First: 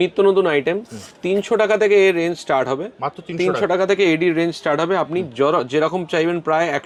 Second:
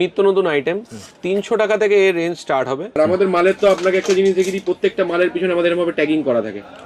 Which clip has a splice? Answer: second; 1 cut; at 2.9 s

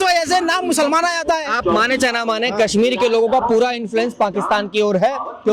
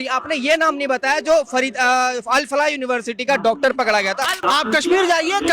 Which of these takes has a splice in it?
second; 1 cut; at 4.4 s

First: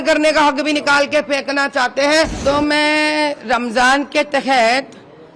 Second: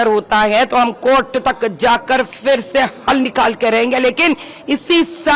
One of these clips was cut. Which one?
first; 1 cut; at 2.3 s

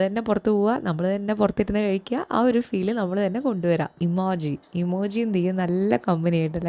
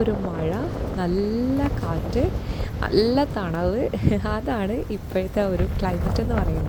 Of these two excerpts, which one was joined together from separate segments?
first; 1 cut; at 4.0 s

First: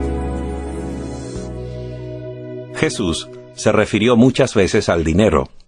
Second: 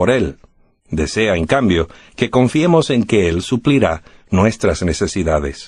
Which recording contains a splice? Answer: second; 1 cut; at 4.5 s

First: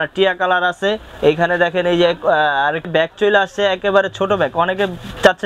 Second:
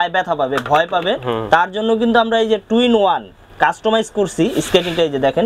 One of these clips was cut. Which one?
first; 1 cut; at 2.9 s

